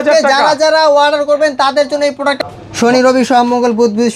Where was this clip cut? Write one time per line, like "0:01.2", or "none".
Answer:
0:02.4